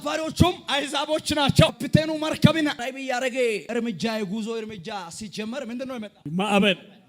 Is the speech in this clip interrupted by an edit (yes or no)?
yes